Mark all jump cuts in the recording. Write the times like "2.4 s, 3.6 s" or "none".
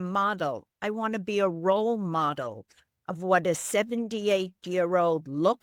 none

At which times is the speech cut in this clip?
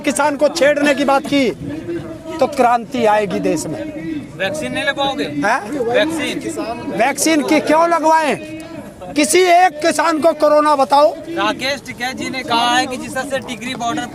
none

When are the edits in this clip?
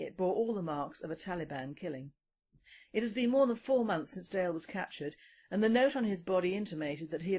none

